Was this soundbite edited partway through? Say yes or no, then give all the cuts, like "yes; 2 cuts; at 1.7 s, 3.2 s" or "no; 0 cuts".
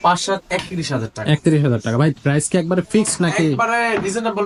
no; 0 cuts